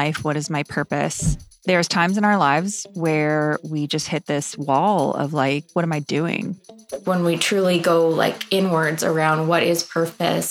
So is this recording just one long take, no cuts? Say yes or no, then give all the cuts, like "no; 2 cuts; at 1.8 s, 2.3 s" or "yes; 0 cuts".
no; 3 cuts; at 1.3 s, 5.7 s, 6.8 s